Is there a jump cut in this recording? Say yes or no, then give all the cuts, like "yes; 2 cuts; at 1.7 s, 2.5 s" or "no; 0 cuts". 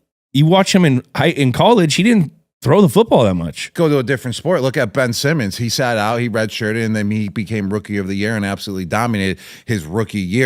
yes; 1 cut; at 3.7 s